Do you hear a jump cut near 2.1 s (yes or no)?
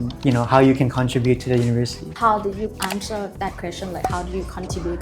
yes